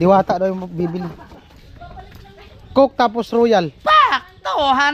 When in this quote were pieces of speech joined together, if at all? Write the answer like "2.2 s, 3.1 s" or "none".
none